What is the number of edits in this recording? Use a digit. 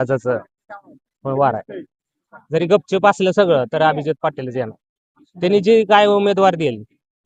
0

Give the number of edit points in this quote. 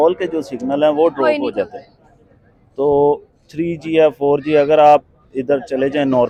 0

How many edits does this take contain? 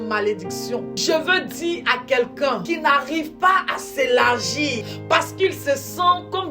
3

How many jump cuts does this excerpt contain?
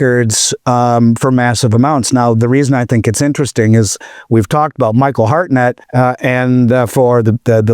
1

